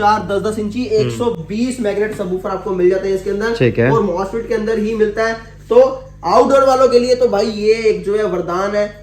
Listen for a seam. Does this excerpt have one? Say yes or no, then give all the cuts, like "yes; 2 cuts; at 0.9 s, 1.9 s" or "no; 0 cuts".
no; 0 cuts